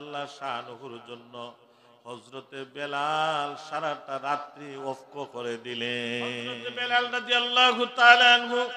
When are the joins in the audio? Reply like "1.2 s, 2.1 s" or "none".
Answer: 6.7 s